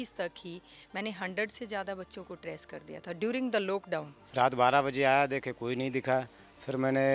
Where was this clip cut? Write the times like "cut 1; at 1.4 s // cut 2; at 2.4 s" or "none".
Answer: cut 1; at 4.2 s